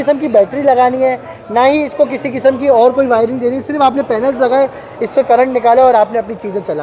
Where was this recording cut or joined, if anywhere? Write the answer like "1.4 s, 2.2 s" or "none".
none